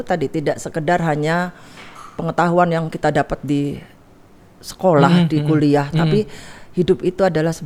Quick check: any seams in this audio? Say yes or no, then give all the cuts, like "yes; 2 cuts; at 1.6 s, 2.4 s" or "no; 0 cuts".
no; 0 cuts